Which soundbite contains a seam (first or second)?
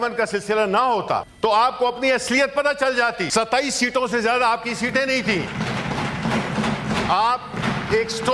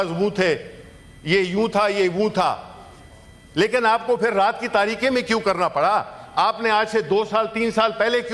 first